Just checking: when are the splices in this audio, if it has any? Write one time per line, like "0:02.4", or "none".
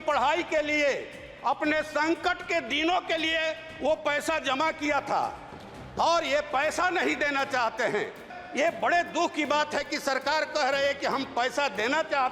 0:08.4